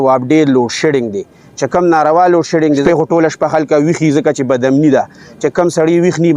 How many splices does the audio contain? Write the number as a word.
one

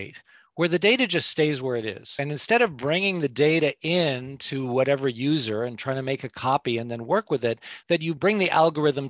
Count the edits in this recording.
one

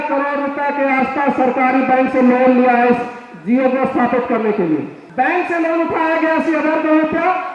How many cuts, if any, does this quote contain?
one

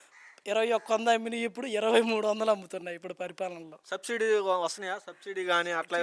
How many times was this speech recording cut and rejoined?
one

